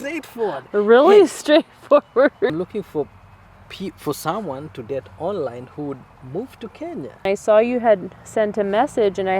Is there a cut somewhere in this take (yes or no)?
yes